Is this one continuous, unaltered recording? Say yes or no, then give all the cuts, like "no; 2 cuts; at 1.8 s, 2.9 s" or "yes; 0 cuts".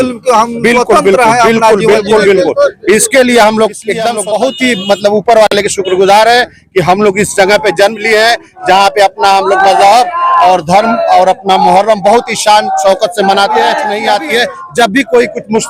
no; 2 cuts; at 4.1 s, 13.9 s